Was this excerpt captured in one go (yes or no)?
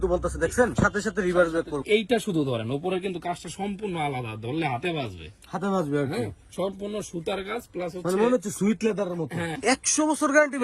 no